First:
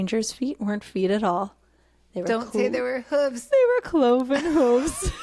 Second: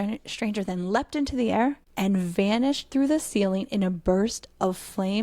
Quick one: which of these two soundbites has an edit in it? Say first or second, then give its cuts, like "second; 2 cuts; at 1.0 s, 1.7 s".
second; 1 cut; at 1.9 s